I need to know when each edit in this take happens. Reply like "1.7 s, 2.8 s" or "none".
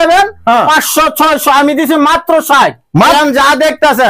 3.2 s